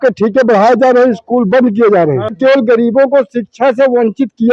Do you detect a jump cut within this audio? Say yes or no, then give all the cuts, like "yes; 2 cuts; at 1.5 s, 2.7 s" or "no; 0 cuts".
yes; 1 cut; at 2.4 s